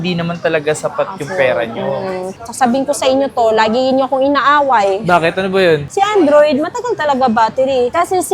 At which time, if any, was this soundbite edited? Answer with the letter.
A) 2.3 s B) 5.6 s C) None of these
A